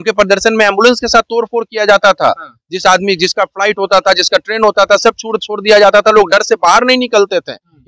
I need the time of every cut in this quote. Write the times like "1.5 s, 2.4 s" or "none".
none